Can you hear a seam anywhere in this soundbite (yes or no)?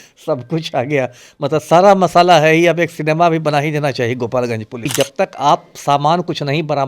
yes